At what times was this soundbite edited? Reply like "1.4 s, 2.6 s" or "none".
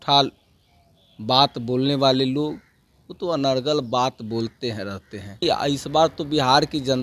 5.4 s